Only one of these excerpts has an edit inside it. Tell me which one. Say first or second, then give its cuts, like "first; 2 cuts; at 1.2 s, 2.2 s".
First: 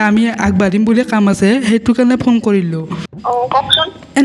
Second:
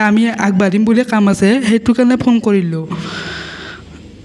first; 1 cut; at 3.0 s